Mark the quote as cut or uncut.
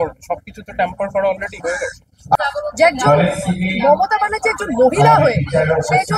cut